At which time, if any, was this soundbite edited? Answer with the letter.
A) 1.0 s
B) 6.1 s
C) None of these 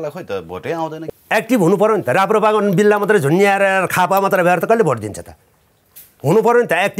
A